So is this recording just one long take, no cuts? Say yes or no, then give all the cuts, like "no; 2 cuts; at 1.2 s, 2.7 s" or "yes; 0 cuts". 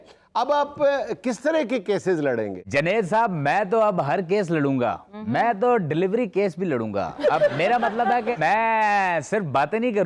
yes; 0 cuts